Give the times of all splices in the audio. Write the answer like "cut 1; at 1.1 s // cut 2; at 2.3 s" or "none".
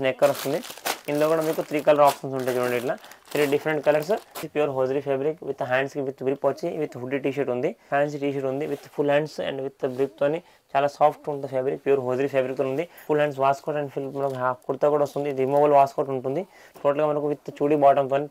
cut 1; at 4.4 s // cut 2; at 7.8 s // cut 3; at 12.9 s